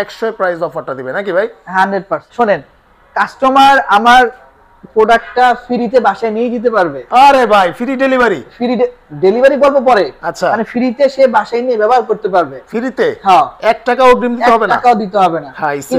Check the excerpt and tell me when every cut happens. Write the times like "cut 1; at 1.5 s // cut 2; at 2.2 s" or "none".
cut 1; at 2.3 s